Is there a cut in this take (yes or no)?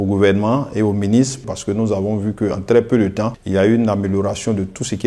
yes